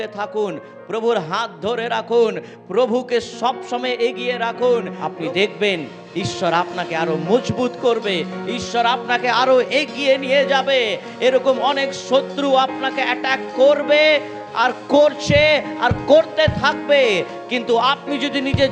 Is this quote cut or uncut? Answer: cut